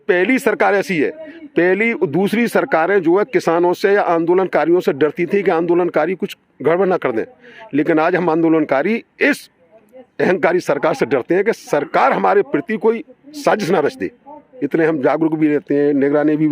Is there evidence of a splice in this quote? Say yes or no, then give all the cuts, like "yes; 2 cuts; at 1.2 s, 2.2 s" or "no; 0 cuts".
no; 0 cuts